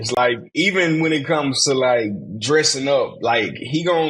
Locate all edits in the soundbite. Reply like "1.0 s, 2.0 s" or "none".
none